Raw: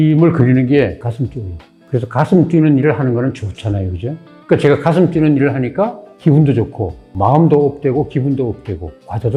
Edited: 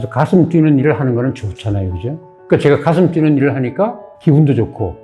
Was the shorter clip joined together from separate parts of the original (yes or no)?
no